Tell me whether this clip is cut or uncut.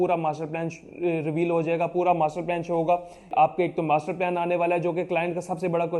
cut